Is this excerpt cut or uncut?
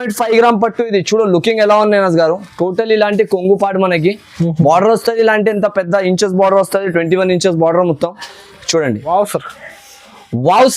cut